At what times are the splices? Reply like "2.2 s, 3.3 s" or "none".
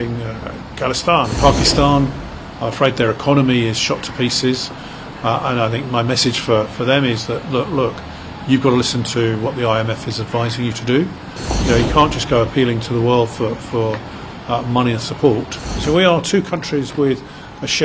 1.4 s, 11.5 s, 15.7 s